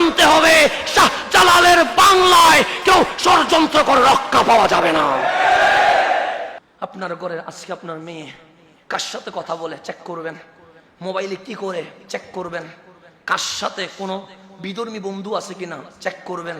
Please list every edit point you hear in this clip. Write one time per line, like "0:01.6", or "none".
0:06.5